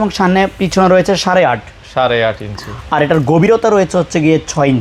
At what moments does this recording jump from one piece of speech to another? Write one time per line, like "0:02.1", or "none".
none